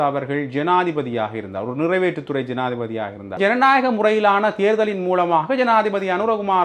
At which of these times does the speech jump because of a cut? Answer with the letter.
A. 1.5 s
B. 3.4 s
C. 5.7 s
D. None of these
B